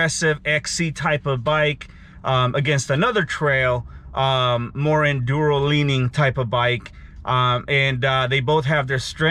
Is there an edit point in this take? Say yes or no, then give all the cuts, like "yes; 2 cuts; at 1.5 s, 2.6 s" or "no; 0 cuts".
no; 0 cuts